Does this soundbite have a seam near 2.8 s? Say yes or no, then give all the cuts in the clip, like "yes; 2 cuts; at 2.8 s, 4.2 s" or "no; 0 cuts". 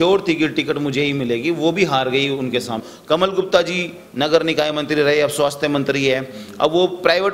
yes; 1 cut; at 2.8 s